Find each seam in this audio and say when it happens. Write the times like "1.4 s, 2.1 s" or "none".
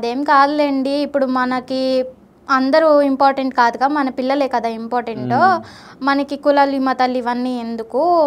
none